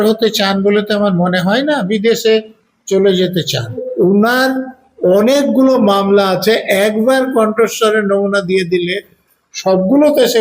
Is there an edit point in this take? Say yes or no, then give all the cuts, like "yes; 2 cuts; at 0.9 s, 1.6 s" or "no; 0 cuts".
yes; 1 cut; at 3.8 s